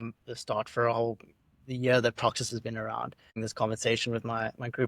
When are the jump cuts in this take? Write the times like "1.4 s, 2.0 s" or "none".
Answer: 3.2 s